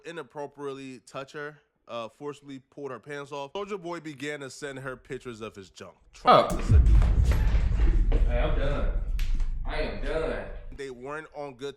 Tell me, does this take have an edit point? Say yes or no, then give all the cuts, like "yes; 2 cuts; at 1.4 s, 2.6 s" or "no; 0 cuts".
yes; 2 cuts; at 3.5 s, 10.6 s